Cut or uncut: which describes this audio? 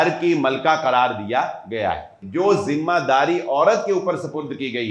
cut